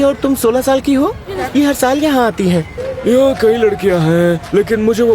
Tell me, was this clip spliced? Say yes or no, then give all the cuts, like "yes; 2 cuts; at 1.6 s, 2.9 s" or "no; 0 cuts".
yes; 2 cuts; at 1.3 s, 2.8 s